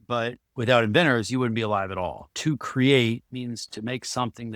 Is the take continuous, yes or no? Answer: no